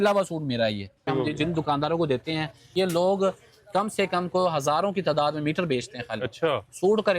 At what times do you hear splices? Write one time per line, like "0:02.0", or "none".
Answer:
0:01.1
0:02.7